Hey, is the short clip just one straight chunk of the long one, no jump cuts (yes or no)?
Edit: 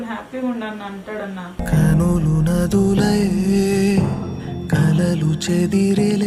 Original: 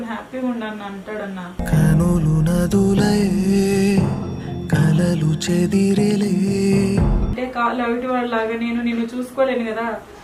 yes